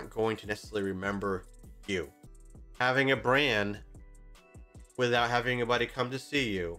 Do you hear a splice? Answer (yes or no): yes